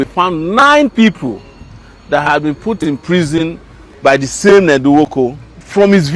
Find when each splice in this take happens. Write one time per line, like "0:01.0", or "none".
none